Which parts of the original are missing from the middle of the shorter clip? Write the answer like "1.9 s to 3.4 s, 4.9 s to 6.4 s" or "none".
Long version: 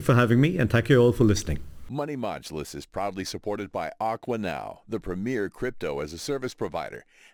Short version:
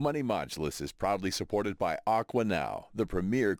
none